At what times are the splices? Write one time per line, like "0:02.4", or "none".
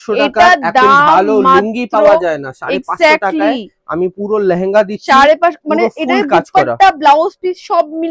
none